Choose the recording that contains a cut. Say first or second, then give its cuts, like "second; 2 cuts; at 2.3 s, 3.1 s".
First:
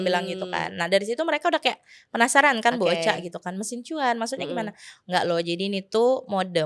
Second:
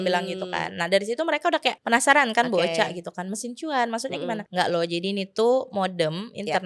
second; 2 cuts; at 1.8 s, 4.5 s